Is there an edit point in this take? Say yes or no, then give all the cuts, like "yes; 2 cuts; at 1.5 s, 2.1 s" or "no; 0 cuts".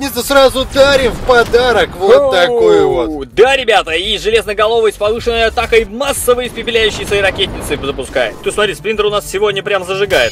yes; 1 cut; at 8.4 s